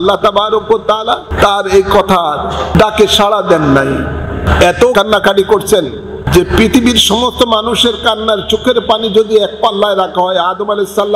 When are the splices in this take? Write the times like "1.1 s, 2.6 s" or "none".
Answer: 1.3 s, 2.7 s, 4.8 s, 6.2 s

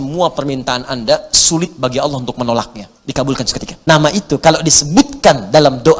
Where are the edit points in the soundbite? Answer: 3.7 s

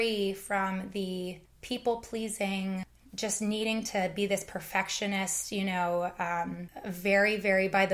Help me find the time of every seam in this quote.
1.5 s, 3.0 s, 6.7 s

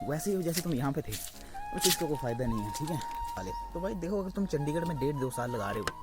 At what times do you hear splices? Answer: 3.4 s

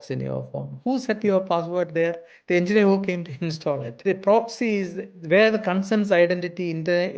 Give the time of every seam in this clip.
4.0 s

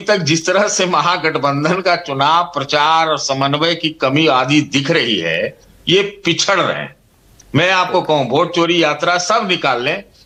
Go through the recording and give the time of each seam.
none

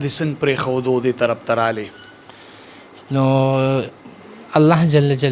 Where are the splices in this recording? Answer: none

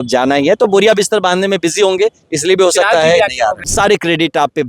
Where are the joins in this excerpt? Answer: 3.7 s

